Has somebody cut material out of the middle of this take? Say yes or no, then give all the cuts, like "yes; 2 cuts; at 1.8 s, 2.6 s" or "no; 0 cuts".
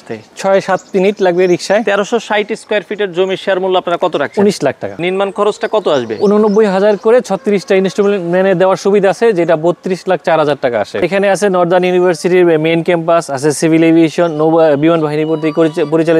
yes; 3 cuts; at 1.8 s, 5.0 s, 11.0 s